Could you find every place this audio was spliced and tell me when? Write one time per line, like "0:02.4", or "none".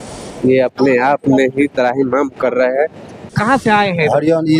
0:03.3